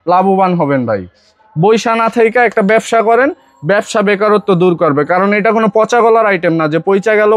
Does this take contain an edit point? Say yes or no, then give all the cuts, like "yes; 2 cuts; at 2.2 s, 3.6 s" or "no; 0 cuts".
no; 0 cuts